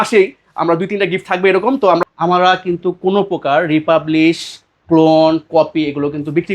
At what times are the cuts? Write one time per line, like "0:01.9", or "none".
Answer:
0:02.0

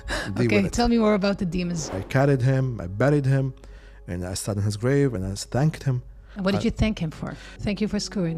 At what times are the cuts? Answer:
0:02.0
0:06.2
0:07.5

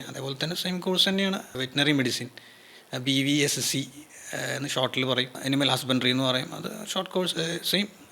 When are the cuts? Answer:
0:01.5
0:05.3

